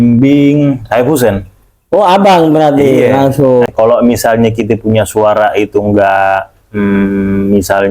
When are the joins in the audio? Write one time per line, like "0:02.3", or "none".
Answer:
0:03.7